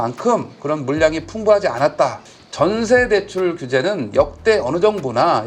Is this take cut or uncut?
cut